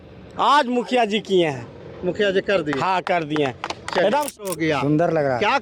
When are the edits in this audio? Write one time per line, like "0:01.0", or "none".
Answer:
0:04.6